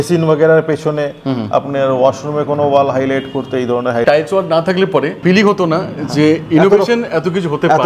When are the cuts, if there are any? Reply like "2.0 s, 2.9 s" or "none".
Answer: 4.0 s, 5.2 s